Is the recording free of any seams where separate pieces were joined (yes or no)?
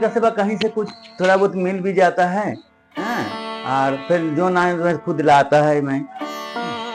yes